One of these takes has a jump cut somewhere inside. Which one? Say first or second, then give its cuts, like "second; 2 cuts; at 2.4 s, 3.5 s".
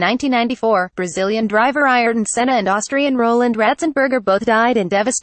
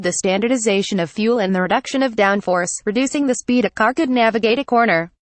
first; 1 cut; at 2.4 s